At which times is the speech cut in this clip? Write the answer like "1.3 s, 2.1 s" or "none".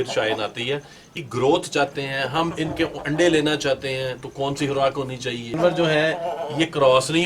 1.1 s, 5.6 s